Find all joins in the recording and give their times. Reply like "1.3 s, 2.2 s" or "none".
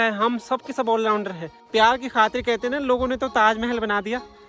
1.6 s